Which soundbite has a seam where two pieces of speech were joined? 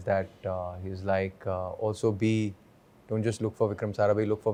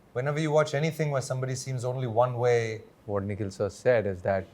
second; 1 cut; at 2.8 s

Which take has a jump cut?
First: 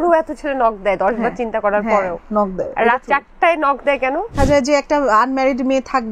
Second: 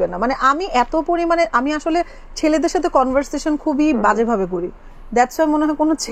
first; 1 cut; at 4.3 s

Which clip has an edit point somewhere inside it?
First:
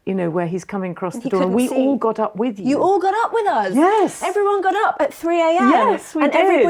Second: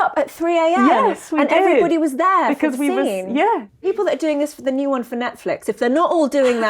second; 1 cut; at 3.9 s

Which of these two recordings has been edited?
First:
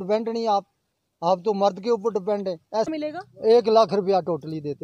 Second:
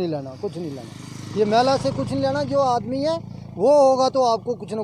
first; 1 cut; at 2.9 s

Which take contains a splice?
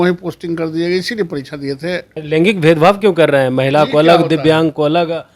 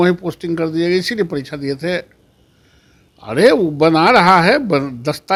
first; 1 cut; at 2.1 s

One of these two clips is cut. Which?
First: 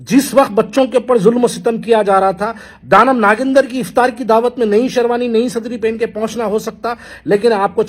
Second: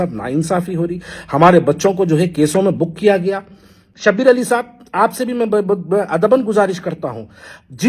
second; 1 cut; at 3.8 s

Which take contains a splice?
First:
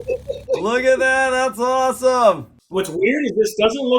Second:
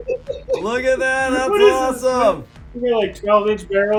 first; 1 cut; at 2.6 s

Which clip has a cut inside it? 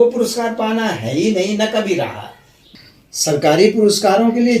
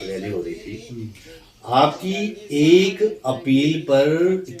first; 1 cut; at 2.5 s

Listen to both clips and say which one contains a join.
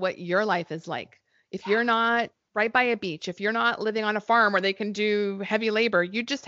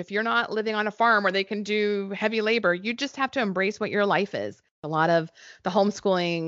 second; 1 cut; at 4.9 s

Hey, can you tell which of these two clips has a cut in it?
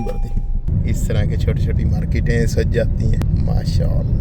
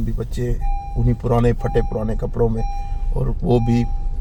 first; 2 cuts; at 0.7 s, 3.2 s

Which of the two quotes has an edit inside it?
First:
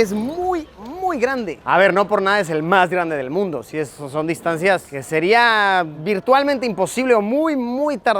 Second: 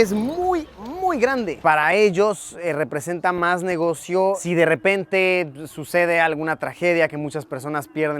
second; 2 cuts; at 1.6 s, 4.4 s

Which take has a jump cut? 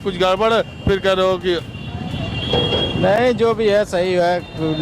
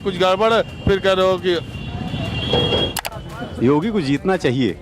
second; 1 cut; at 2.9 s

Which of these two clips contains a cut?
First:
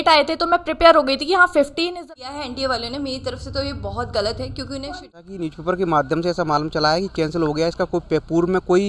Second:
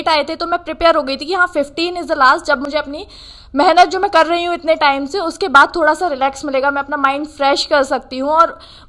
first; 2 cuts; at 2.1 s, 5.1 s

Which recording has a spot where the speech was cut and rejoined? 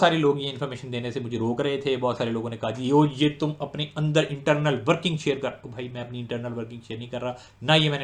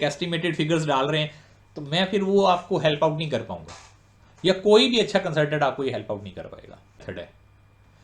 second; 1 cut; at 7.0 s

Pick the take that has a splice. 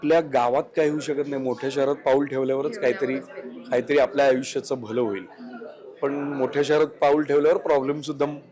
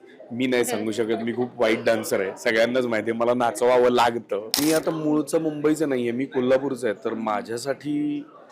second; 1 cut; at 4.6 s

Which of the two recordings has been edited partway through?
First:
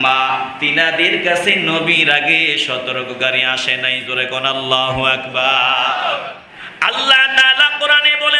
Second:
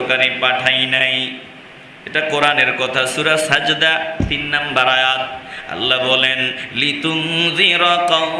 first; 1 cut; at 6.4 s

